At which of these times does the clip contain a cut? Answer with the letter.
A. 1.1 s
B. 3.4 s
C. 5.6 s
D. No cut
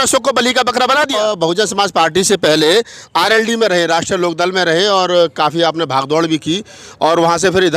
A